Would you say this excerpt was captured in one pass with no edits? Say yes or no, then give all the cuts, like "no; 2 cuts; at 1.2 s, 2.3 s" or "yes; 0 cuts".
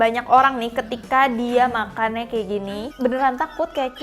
no; 1 cut; at 2.9 s